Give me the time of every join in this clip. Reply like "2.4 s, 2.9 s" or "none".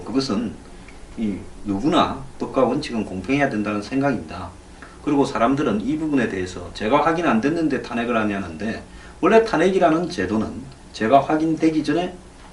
3.7 s